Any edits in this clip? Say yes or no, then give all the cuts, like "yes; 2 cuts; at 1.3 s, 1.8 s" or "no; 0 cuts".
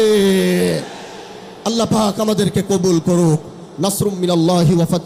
no; 0 cuts